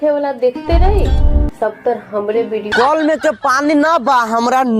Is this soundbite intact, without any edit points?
no; 1 cut; at 2.7 s

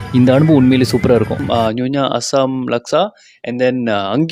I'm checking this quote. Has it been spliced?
yes; 1 cut; at 1.4 s

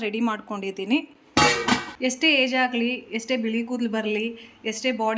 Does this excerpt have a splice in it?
yes; 1 cut; at 1.6 s

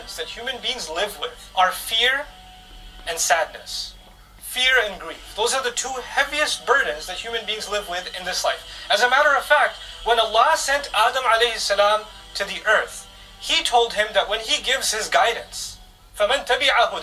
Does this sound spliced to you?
yes; 1 cut; at 1.4 s

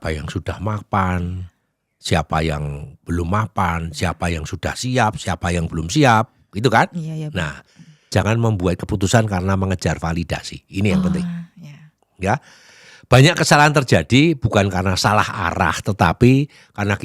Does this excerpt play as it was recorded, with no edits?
no; 1 cut; at 8.1 s

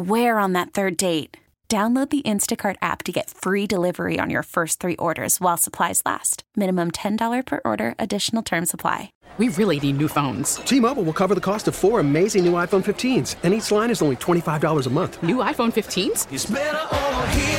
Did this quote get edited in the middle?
yes; 1 cut; at 9.2 s

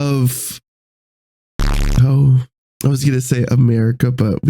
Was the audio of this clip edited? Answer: yes; 1 cut; at 2.6 s

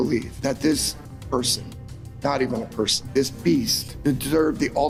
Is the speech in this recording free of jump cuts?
yes; 0 cuts

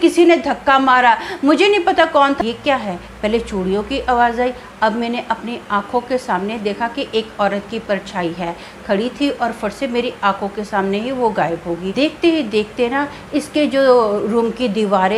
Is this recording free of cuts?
no; 2 cuts; at 2.4 s, 11.9 s

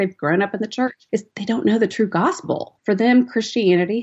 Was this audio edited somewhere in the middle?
yes; 1 cut; at 1.3 s

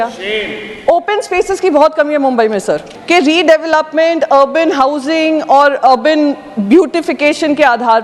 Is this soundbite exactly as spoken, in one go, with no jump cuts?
no; 1 cut; at 2.9 s

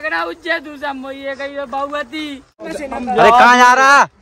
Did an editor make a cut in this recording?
yes; 1 cut; at 2.7 s

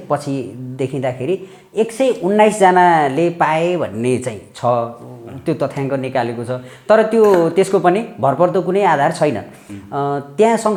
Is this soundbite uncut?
yes; 0 cuts

